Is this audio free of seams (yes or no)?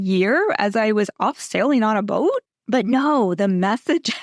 no